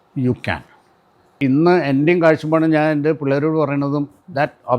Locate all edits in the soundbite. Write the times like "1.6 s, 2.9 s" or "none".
1.4 s